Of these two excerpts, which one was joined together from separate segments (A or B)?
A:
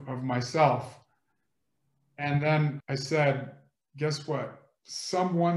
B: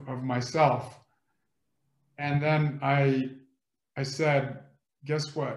A